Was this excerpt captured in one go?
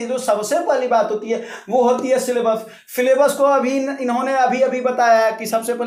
yes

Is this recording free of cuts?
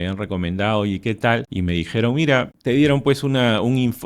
no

